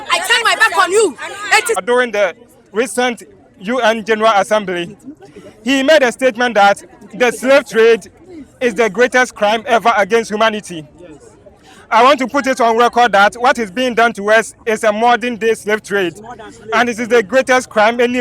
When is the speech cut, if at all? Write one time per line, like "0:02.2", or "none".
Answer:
0:01.8